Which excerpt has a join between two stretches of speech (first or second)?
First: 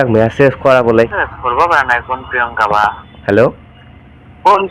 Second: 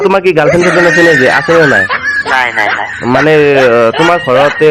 first